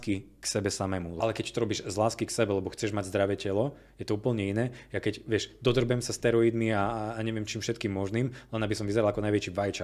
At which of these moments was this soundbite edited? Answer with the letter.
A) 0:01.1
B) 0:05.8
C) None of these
A